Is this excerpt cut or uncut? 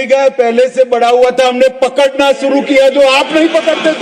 uncut